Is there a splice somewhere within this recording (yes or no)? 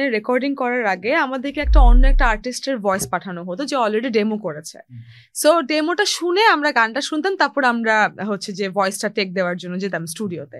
no